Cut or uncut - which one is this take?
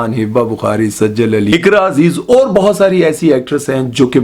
cut